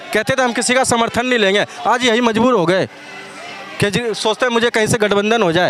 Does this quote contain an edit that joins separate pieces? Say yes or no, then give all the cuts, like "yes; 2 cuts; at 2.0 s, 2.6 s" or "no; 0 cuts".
no; 0 cuts